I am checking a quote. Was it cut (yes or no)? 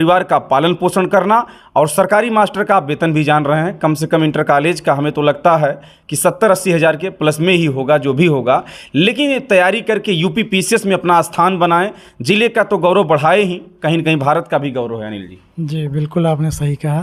no